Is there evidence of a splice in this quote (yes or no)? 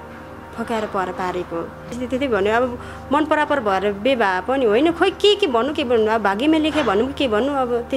yes